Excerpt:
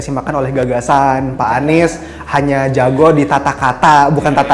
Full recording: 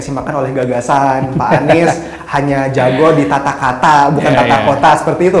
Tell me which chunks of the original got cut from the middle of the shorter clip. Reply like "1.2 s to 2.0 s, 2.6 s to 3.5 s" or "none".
none